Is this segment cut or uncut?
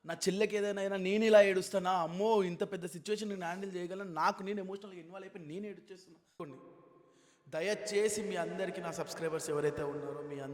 cut